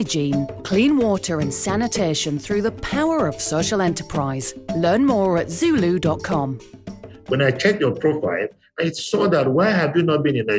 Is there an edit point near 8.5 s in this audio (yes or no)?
no